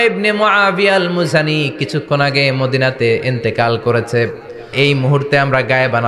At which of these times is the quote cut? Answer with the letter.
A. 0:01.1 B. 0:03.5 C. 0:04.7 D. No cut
C